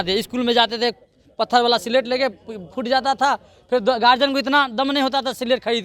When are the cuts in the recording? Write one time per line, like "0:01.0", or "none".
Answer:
none